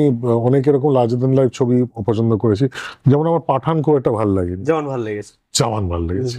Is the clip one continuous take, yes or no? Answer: yes